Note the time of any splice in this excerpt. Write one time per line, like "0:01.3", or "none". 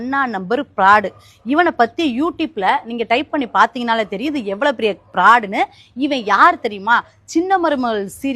none